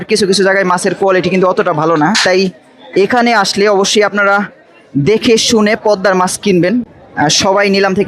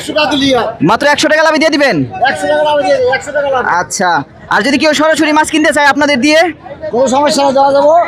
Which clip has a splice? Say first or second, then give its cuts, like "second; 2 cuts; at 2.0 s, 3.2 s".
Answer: first; 1 cut; at 7.0 s